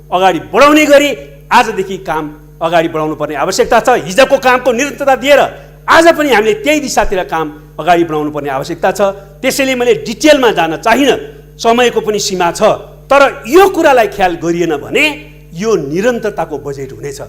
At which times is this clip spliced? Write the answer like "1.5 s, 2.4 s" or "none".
none

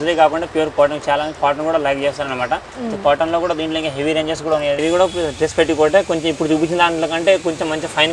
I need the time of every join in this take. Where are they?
4.8 s

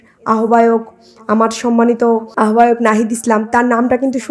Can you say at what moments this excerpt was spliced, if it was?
2.3 s

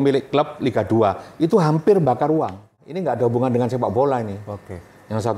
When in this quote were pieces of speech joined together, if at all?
2.9 s

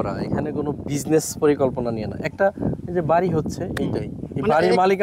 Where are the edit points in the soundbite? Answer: none

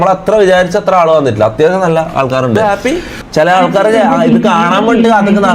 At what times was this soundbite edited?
2.6 s

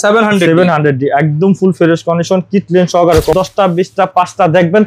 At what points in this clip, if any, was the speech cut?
3.3 s

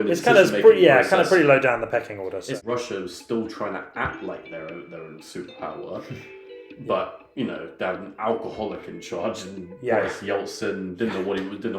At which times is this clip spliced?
2.5 s

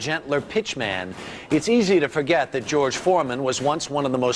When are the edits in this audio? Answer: 3.3 s

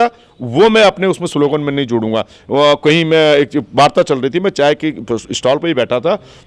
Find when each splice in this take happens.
none

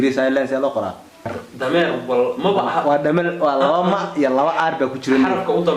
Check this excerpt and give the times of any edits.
1.4 s

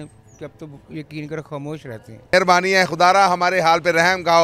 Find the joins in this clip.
2.3 s

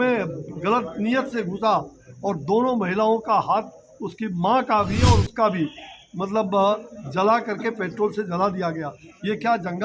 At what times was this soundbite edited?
none

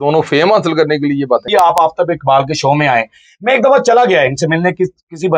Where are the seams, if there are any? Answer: 1.5 s

